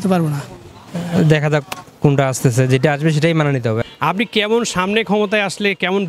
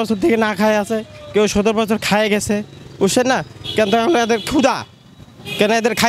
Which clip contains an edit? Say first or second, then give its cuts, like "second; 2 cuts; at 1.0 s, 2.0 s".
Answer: first; 2 cuts; at 0.9 s, 3.8 s